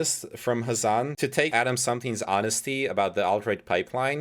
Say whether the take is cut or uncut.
cut